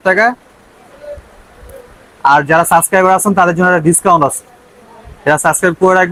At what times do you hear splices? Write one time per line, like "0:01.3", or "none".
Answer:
none